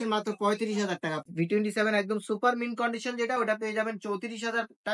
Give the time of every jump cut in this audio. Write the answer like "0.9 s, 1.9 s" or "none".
1.3 s